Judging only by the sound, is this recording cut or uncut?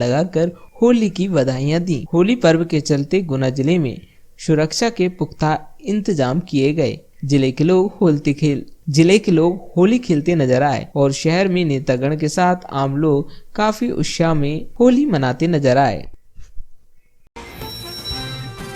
cut